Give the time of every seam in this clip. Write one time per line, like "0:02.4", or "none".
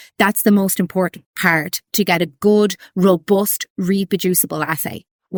none